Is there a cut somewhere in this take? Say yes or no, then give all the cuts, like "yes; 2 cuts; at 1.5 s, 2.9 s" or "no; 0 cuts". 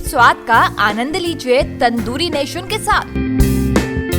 no; 0 cuts